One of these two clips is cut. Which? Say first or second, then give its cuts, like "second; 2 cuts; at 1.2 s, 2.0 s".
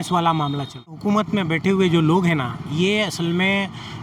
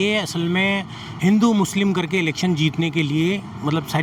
first; 1 cut; at 1.0 s